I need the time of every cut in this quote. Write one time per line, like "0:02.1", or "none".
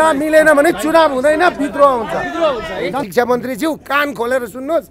0:03.1